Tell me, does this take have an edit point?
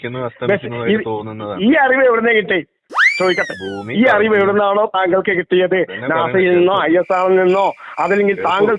no; 0 cuts

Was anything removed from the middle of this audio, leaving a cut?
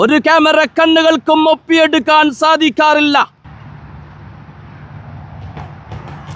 yes; 1 cut; at 3.4 s

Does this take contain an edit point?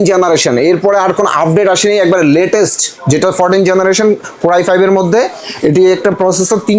no; 0 cuts

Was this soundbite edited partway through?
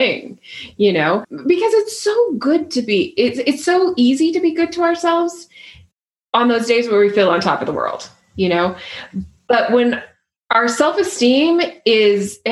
no; 0 cuts

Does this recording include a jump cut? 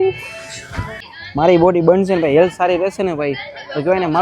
yes; 1 cut; at 1.0 s

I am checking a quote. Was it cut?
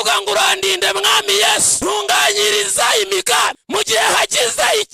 yes; 2 cuts; at 1.7 s, 3.6 s

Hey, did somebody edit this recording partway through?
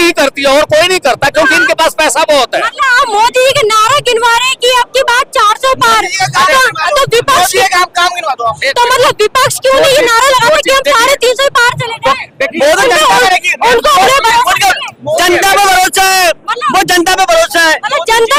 no; 0 cuts

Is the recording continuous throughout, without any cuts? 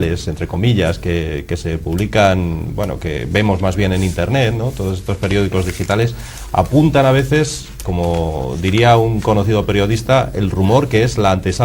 yes; 0 cuts

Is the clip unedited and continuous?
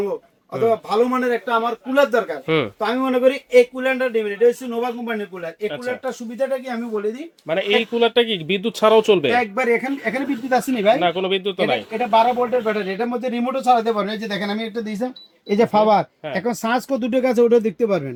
yes; 0 cuts

